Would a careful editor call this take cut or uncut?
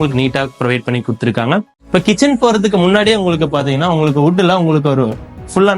cut